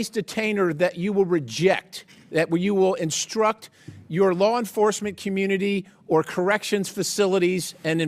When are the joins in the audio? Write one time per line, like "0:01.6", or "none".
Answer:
none

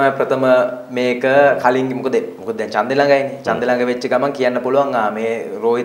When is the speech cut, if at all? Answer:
none

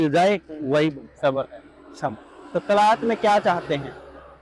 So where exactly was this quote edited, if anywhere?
none

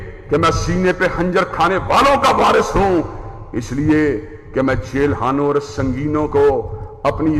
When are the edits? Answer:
none

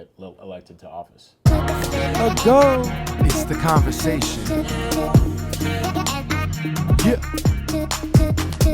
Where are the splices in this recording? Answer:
0:01.4

